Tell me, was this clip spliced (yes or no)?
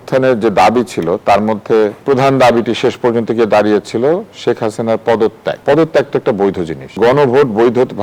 yes